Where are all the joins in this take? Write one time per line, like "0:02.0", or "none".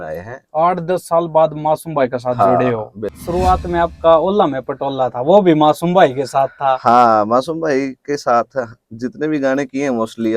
0:03.2